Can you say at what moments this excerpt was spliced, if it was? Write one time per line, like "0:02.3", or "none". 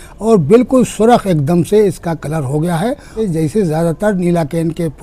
0:03.2